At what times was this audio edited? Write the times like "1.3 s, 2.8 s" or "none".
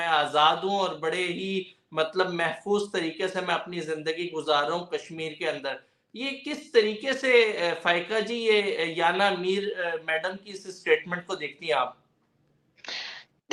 none